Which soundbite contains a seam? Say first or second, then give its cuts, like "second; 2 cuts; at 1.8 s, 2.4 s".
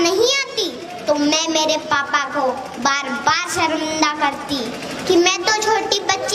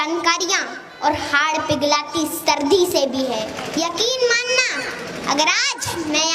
second; 1 cut; at 3.6 s